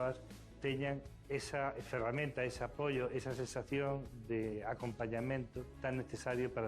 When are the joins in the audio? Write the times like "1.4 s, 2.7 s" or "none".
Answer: 0.8 s, 4.5 s, 5.6 s